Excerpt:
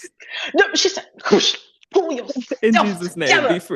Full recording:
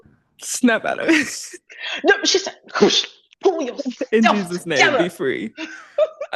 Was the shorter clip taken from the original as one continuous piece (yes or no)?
yes